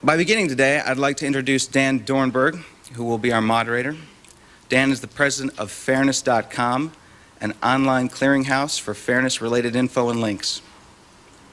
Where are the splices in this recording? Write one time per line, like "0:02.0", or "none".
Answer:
none